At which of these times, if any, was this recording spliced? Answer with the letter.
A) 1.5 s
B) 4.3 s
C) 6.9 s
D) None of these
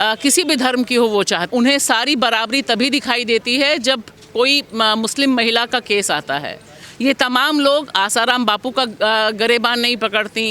A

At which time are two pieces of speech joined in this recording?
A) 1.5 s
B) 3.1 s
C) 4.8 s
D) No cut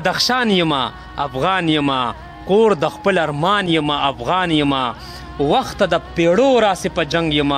D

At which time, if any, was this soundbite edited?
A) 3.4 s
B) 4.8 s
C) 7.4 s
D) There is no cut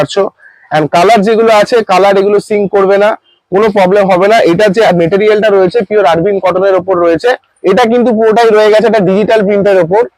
C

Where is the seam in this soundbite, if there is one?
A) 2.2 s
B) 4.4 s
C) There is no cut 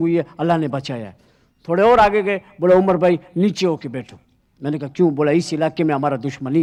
C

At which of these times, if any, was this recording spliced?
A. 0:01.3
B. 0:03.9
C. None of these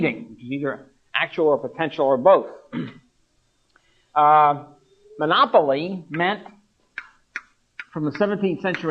A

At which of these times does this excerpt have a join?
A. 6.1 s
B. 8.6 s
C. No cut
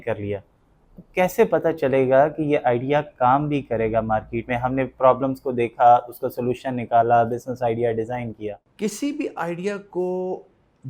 B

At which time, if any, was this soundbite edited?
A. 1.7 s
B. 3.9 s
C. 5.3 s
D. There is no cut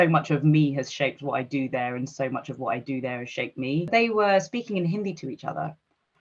B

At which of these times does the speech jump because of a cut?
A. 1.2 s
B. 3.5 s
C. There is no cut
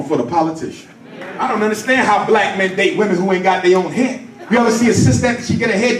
A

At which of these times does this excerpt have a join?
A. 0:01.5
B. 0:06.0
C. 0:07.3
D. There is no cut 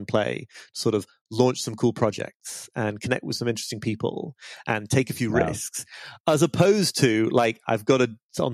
D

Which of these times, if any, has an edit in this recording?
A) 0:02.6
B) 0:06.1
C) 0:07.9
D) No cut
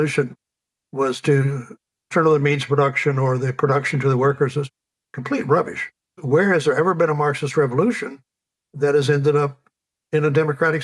B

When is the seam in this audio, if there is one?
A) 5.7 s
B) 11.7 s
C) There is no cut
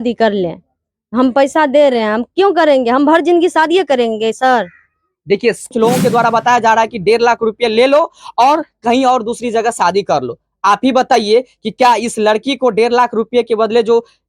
A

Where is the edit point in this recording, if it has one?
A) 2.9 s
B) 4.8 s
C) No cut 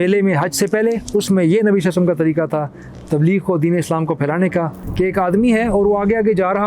B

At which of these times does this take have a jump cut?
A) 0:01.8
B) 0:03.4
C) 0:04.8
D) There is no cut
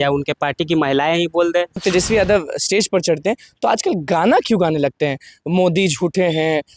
A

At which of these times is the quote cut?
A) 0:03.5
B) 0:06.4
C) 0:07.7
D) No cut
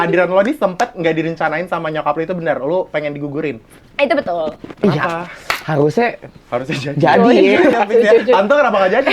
C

